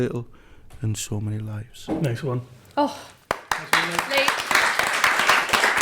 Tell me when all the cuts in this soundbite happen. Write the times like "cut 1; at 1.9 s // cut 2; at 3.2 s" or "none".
none